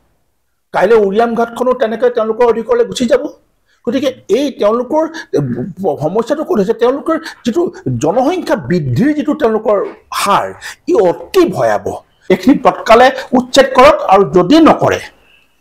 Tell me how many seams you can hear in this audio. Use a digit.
1